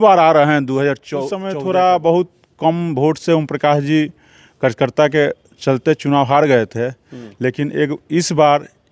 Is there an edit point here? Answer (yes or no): yes